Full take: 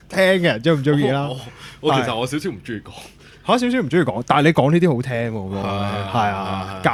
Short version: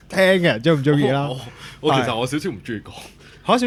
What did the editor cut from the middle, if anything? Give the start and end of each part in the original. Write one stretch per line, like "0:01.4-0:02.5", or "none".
none